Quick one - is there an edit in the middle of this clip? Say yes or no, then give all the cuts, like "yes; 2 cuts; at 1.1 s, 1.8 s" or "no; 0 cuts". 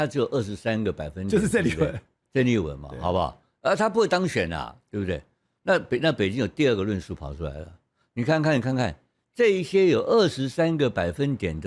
no; 0 cuts